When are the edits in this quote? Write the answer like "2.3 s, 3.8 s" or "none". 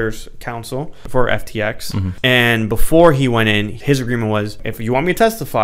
1.0 s, 2.1 s, 3.8 s, 4.7 s